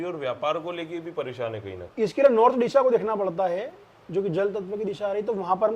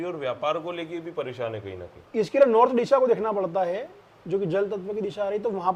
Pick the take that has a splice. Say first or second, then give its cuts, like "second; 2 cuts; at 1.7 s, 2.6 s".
first; 1 cut; at 1.8 s